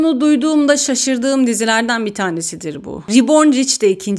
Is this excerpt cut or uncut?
uncut